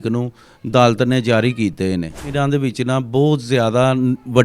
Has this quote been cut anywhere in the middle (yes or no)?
yes